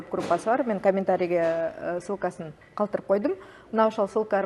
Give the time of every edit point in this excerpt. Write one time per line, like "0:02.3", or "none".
none